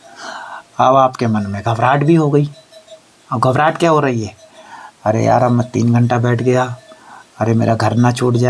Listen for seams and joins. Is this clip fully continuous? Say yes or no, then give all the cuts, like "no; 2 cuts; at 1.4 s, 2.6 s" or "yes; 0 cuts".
yes; 0 cuts